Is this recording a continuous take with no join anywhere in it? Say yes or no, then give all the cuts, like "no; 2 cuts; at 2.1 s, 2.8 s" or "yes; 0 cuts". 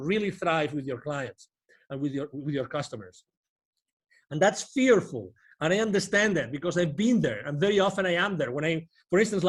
yes; 0 cuts